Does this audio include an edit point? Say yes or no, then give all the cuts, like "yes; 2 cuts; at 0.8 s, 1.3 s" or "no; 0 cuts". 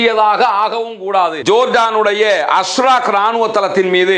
yes; 1 cut; at 1.4 s